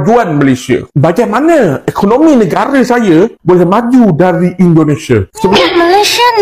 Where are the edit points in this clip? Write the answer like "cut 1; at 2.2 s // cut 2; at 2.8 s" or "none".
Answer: cut 1; at 5.5 s